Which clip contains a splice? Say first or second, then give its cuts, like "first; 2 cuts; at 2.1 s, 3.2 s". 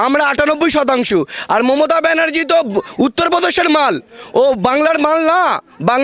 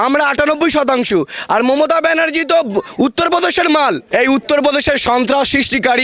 second; 1 cut; at 4.0 s